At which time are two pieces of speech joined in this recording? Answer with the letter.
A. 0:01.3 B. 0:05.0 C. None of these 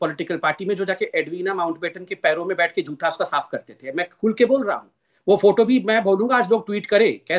B